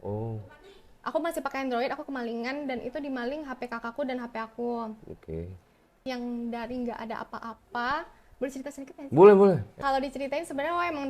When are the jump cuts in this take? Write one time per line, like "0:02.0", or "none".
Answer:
0:06.0
0:09.7